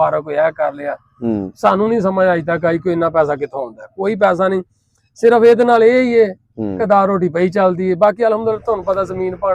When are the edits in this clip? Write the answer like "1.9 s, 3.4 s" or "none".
none

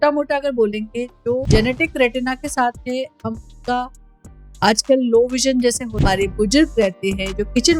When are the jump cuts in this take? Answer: 1.4 s, 5.9 s

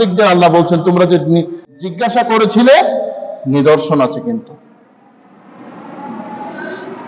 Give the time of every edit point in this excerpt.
1.7 s

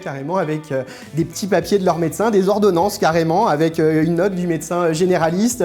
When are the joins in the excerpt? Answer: none

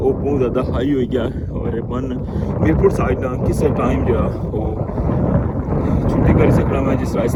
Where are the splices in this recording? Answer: none

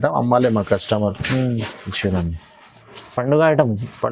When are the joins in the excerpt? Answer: none

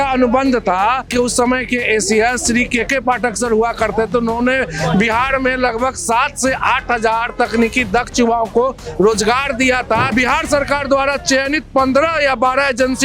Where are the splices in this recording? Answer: 1.0 s, 10.1 s

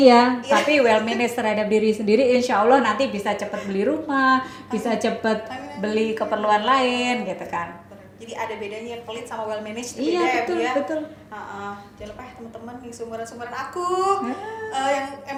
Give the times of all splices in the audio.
none

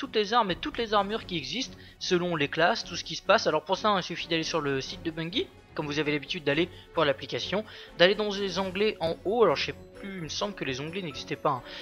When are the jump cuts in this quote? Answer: 9.4 s

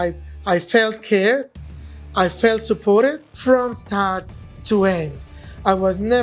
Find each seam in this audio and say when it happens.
3.3 s

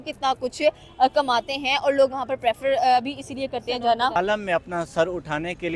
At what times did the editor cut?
4.2 s

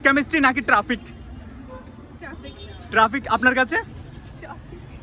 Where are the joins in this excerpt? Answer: none

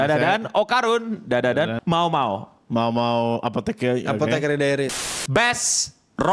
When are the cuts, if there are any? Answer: 1.7 s, 5.0 s

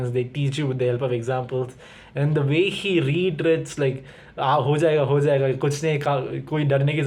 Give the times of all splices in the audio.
none

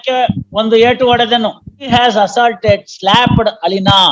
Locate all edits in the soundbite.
1.9 s

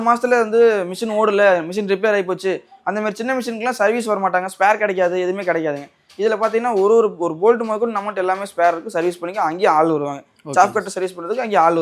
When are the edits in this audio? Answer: none

